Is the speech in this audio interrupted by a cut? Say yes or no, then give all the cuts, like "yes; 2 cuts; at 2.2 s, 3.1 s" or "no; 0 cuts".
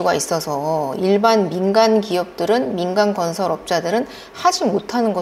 no; 0 cuts